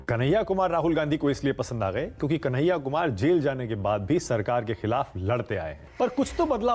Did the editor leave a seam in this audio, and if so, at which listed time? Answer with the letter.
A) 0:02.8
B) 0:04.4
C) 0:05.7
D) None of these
C